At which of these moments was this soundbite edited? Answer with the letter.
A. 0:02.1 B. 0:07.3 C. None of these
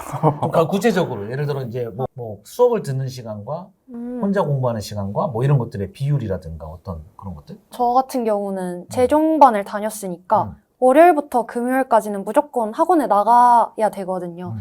A